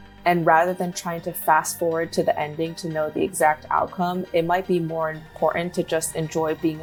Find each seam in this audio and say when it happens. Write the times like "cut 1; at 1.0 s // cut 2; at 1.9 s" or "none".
none